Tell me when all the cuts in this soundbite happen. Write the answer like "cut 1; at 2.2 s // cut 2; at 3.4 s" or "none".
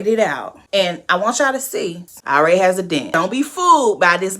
cut 1; at 2.1 s // cut 2; at 3.1 s